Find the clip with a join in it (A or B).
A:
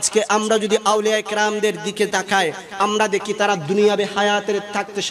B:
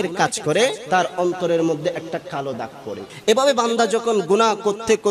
B